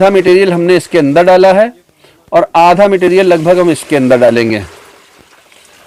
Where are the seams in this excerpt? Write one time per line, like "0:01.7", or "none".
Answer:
none